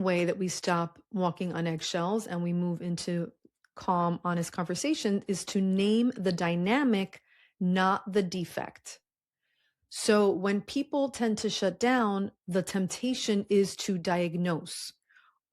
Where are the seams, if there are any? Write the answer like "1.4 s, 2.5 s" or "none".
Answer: none